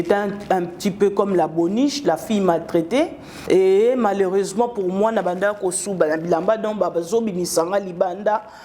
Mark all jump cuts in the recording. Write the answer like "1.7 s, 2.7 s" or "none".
3.3 s

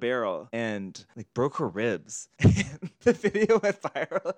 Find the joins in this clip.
2.8 s

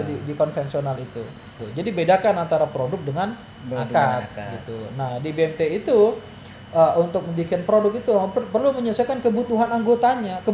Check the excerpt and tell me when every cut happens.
1.6 s

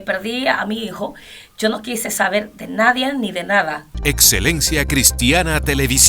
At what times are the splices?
3.9 s

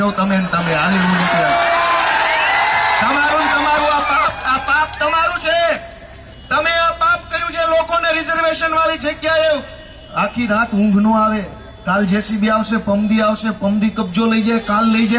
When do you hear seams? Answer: none

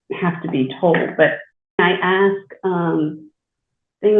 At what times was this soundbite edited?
1.8 s

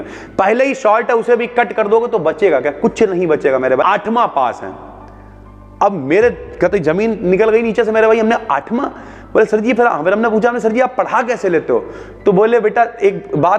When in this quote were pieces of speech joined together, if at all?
3.8 s

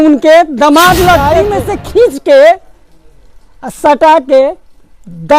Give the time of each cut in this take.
1.4 s

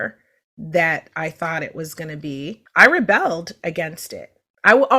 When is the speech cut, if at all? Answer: 2.6 s

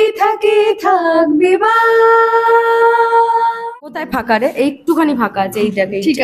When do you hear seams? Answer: 3.6 s

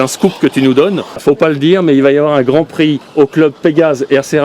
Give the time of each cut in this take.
1.2 s

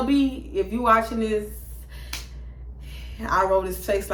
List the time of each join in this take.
none

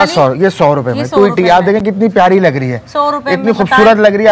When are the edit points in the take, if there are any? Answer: none

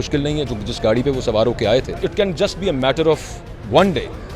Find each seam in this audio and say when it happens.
2.0 s

